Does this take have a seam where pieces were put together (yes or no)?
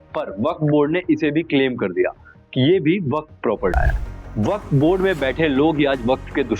yes